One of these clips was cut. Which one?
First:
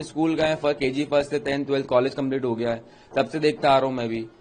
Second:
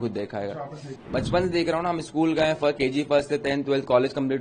second; 1 cut; at 1.0 s

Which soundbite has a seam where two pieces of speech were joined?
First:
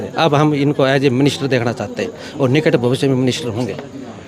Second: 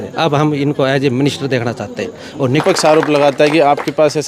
second; 1 cut; at 2.6 s

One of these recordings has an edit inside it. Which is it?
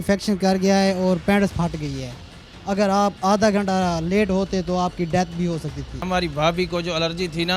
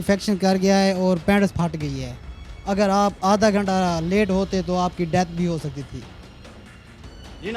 first; 1 cut; at 6.0 s

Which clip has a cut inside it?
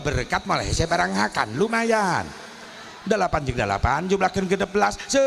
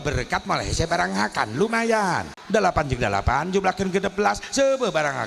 second; 1 cut; at 2.3 s

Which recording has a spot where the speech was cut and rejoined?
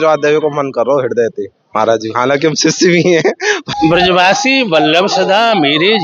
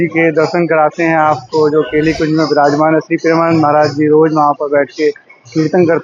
first; 1 cut; at 3.7 s

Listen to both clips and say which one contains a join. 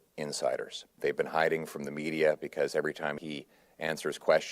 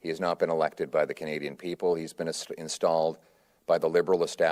first; 2 cuts; at 0.9 s, 3.2 s

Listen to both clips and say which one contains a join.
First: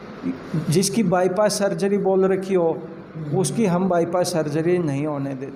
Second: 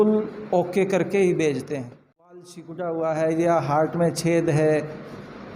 second; 1 cut; at 2.6 s

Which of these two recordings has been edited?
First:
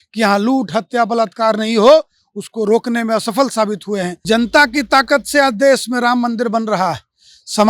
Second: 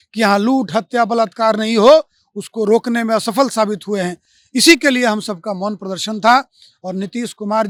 first; 1 cut; at 4.2 s

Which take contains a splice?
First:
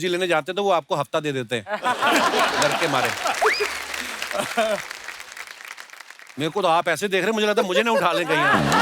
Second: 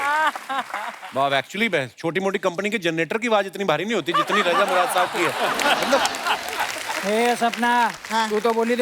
second; 1 cut; at 6.9 s

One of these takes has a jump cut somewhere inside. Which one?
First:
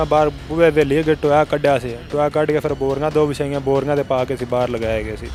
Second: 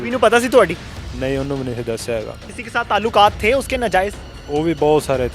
second; 1 cut; at 2.5 s

